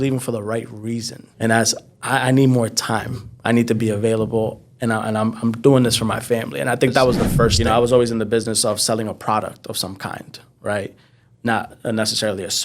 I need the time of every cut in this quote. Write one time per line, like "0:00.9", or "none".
0:01.2
0:07.6